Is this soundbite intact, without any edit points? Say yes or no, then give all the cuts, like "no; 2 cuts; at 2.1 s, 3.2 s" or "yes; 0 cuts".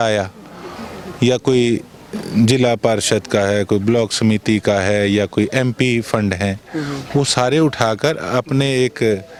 yes; 0 cuts